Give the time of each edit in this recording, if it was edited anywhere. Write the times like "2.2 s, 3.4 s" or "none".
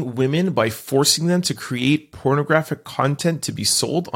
none